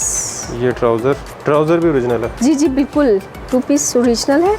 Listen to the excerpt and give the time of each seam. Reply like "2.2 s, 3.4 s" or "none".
1.3 s, 3.3 s